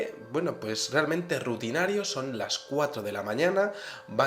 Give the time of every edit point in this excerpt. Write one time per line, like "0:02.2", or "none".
0:03.3